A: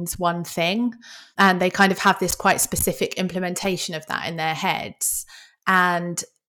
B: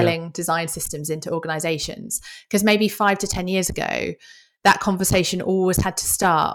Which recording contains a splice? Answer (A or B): A